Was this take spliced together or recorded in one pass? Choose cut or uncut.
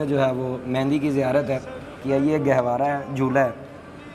cut